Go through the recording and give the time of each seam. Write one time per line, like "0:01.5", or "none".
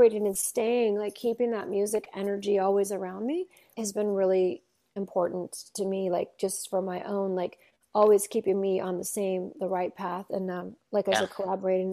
0:03.8
0:04.7